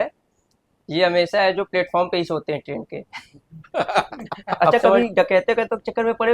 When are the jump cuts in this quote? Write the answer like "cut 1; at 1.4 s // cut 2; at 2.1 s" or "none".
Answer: cut 1; at 5.0 s